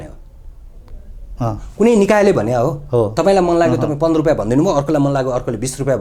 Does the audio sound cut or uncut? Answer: uncut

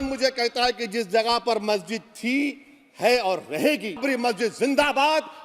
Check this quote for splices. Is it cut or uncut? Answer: cut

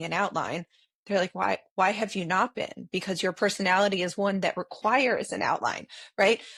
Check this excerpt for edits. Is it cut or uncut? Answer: uncut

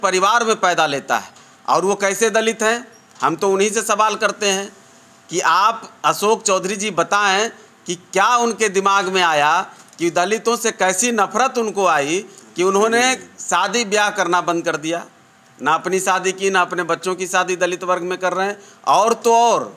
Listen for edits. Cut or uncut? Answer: uncut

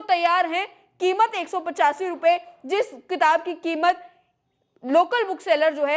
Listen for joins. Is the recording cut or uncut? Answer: uncut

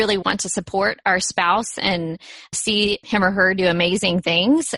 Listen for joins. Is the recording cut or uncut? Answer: cut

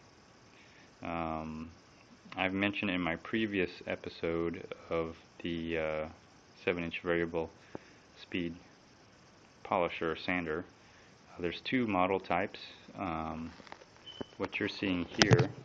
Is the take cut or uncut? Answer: uncut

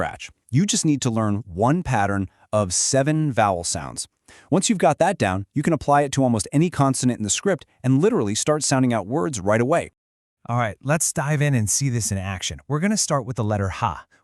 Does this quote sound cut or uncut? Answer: uncut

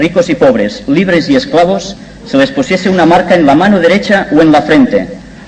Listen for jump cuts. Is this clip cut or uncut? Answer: uncut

